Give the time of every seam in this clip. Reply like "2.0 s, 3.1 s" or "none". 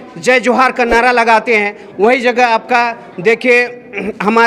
none